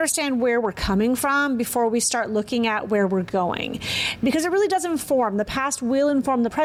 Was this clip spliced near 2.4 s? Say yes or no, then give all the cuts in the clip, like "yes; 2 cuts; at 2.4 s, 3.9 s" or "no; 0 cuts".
no; 0 cuts